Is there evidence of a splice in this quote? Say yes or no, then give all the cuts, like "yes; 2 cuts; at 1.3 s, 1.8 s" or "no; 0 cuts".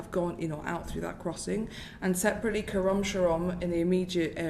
no; 0 cuts